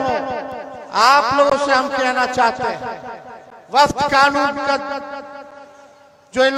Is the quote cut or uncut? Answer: uncut